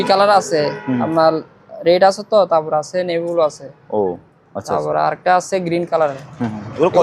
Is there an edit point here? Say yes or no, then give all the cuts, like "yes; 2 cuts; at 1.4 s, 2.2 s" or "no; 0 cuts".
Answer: no; 0 cuts